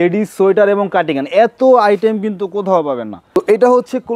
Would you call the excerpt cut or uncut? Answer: cut